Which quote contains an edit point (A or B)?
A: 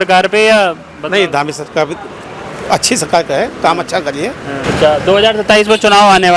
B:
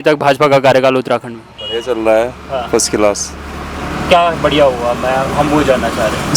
A